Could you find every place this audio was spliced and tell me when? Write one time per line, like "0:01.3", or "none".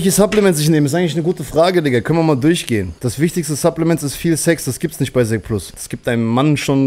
0:02.9
0:05.7